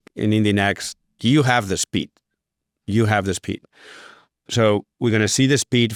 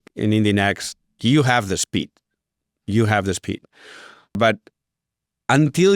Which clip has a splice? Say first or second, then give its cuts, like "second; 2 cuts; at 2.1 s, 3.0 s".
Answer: second; 1 cut; at 4.4 s